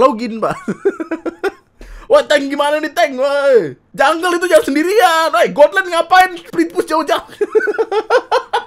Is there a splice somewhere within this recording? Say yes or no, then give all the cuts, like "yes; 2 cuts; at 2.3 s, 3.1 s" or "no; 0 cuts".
yes; 2 cuts; at 3.8 s, 6.4 s